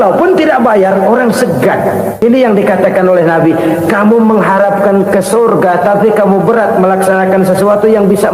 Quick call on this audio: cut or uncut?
cut